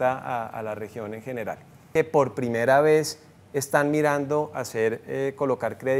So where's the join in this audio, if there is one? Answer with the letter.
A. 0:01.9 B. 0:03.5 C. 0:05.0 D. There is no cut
A